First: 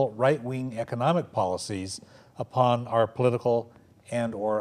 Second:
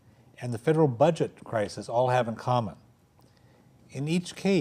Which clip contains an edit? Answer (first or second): second